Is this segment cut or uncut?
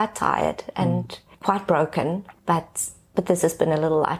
uncut